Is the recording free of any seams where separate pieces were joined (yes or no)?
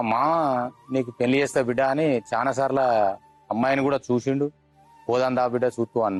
yes